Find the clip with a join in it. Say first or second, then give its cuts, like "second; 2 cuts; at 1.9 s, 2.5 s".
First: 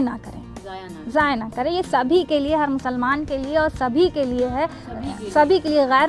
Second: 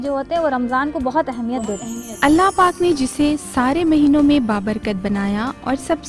second; 1 cut; at 1.6 s